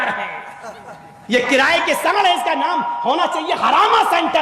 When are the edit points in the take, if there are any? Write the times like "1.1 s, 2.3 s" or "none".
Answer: none